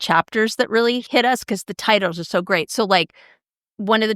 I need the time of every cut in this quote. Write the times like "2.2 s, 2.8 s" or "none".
none